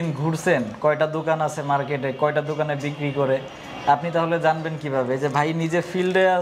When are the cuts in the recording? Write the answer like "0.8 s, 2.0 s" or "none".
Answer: none

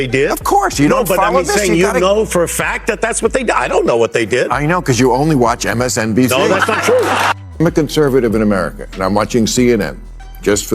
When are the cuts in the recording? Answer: 7.1 s

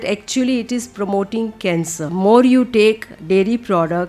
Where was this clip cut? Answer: 2.1 s

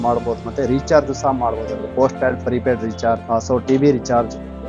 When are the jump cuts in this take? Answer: 3.2 s

